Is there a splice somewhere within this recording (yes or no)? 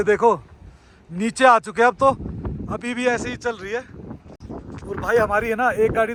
no